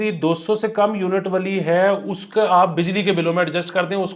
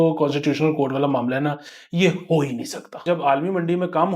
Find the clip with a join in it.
second; 1 cut; at 3.0 s

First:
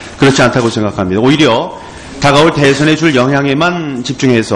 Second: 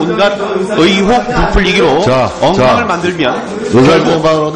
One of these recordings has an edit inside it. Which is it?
second; 1 cut; at 2.2 s

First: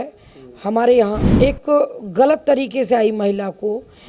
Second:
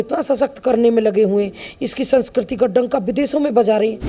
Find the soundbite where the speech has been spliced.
first; 1 cut; at 1.2 s

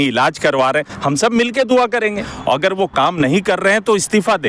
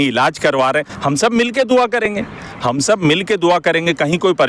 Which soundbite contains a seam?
first; 1 cut; at 2.1 s

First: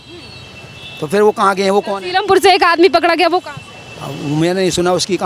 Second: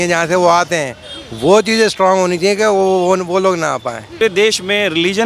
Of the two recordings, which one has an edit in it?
second; 1 cut; at 4.2 s

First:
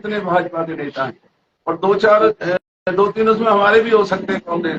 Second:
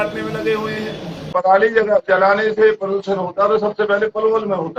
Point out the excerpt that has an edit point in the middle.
second; 1 cut; at 1.3 s

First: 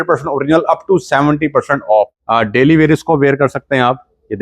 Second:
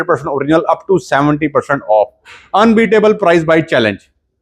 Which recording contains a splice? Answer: first; 1 cut; at 2.2 s

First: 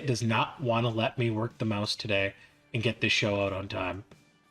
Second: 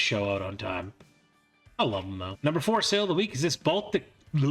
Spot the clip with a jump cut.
second; 1 cut; at 2.3 s

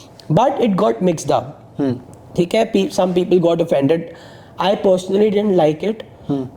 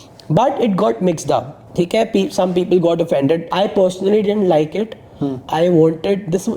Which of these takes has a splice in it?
second; 2 cuts; at 1.6 s, 3.5 s

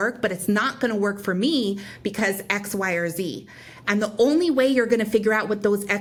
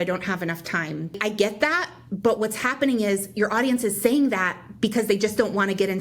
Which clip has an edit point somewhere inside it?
second; 1 cut; at 1.2 s

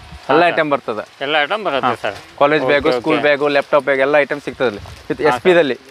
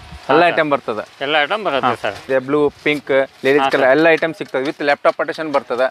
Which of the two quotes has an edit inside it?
second; 1 cut; at 2.2 s

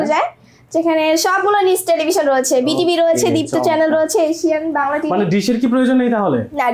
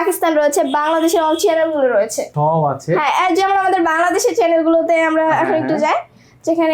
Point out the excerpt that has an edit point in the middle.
second; 1 cut; at 2.3 s

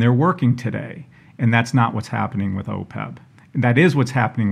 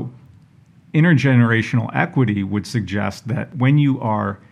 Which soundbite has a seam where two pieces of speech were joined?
second; 1 cut; at 3.5 s

